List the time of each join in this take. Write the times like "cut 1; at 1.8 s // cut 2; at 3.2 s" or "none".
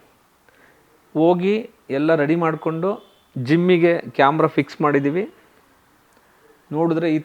none